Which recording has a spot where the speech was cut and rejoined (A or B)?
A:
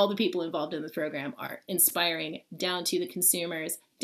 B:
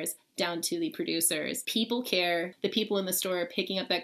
B